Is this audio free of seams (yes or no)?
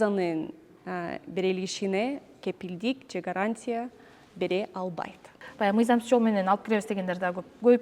no